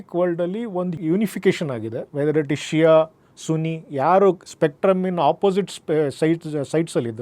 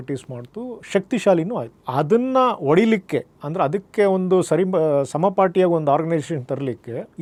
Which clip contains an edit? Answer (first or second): first